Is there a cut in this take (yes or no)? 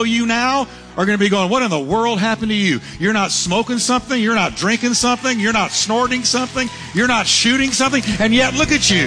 no